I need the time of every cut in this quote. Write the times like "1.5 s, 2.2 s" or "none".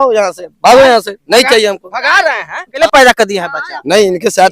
2.7 s